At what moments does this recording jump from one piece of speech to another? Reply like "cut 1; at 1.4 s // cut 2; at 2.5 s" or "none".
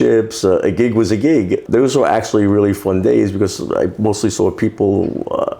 cut 1; at 1.6 s